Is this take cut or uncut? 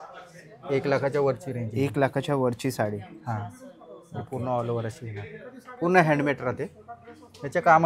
uncut